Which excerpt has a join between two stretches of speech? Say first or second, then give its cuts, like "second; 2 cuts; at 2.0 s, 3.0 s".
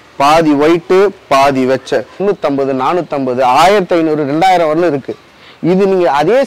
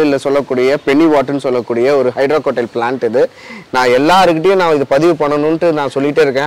first; 1 cut; at 2.2 s